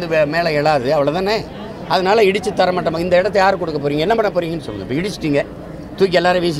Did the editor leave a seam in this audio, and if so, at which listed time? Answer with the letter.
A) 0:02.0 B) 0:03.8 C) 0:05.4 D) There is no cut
D